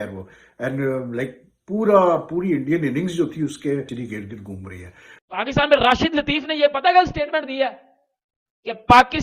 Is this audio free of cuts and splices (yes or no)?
no